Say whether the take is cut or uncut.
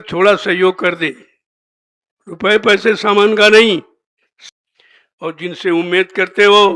cut